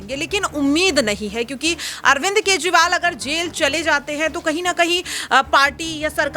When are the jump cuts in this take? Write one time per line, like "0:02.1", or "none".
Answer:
none